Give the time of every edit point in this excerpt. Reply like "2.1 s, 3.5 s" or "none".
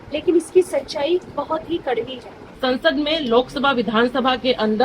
2.4 s